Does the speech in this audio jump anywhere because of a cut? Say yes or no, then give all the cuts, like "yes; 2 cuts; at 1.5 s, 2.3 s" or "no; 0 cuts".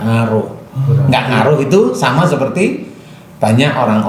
no; 0 cuts